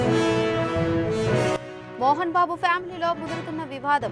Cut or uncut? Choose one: cut